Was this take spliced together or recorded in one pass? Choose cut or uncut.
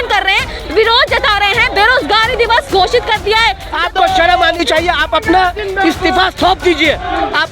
cut